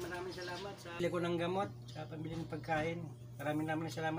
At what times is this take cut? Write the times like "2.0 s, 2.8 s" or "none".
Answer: 1.0 s